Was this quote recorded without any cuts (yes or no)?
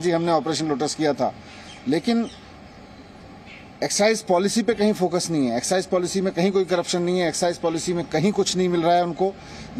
yes